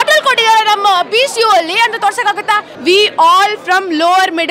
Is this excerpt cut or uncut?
cut